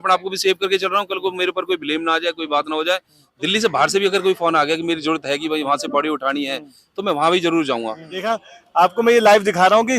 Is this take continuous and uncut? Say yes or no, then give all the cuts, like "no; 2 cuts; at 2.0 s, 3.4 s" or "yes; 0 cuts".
no; 2 cuts; at 3.2 s, 8.2 s